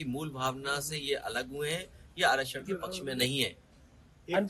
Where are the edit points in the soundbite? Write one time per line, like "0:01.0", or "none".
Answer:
none